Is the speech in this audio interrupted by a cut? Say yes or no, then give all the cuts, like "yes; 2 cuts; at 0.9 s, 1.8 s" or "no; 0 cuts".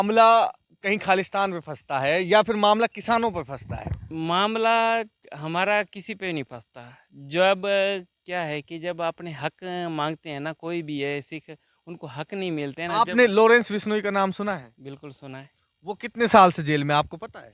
no; 0 cuts